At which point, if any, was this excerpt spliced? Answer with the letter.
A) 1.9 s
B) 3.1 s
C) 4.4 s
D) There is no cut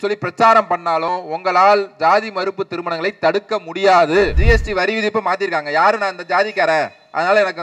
C